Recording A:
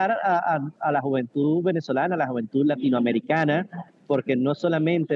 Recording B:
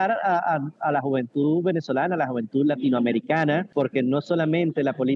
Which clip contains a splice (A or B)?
B